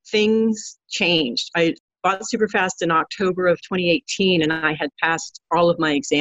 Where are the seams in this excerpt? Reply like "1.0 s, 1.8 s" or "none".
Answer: 1.8 s